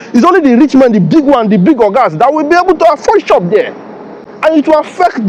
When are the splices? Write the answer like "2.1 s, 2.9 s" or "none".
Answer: none